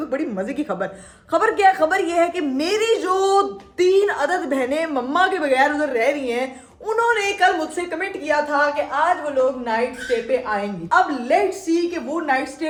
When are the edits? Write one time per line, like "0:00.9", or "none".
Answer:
none